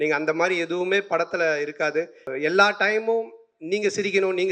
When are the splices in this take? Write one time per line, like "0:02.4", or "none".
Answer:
0:02.3